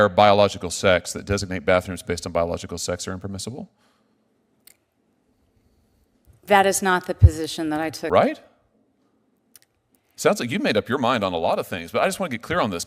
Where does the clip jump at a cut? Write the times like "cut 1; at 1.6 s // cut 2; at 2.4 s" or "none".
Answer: cut 1; at 8.0 s